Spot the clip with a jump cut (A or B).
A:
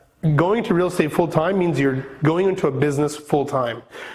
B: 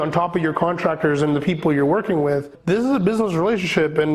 B